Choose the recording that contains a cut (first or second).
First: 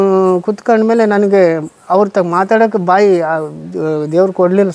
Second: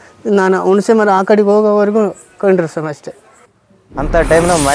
second